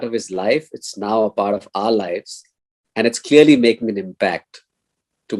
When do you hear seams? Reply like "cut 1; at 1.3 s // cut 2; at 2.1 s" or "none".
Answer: none